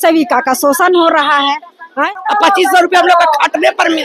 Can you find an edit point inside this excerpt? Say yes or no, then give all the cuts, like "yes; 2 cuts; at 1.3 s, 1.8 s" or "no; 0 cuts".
yes; 1 cut; at 2.1 s